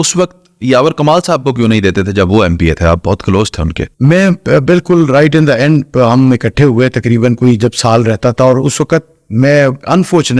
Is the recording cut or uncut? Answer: uncut